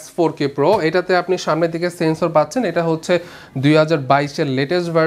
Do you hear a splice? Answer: no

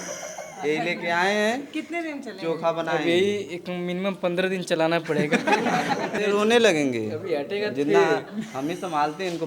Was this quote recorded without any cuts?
no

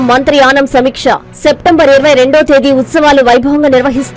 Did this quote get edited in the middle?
no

